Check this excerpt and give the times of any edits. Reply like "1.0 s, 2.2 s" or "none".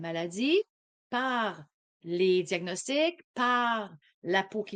none